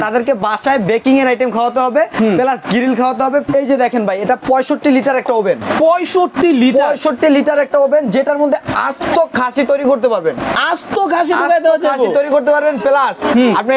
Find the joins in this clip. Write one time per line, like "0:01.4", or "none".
0:03.5